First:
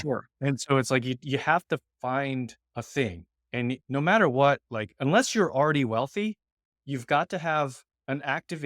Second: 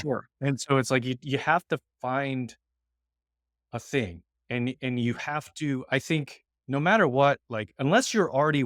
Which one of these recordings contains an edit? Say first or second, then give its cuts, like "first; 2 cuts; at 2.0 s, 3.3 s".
first; 2 cuts; at 2.6 s, 3.8 s